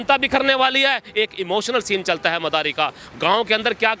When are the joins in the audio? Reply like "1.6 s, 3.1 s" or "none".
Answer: none